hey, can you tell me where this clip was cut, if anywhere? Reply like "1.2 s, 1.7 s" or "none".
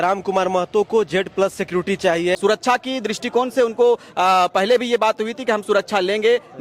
2.4 s